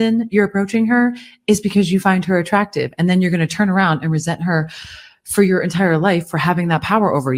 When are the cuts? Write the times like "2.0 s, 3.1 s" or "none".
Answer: none